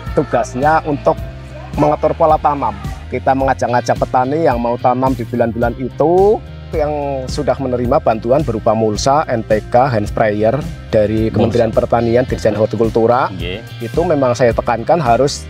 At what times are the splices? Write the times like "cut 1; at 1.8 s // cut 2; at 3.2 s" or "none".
cut 1; at 3.1 s // cut 2; at 6.7 s